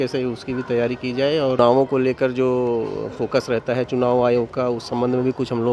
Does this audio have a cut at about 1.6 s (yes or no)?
yes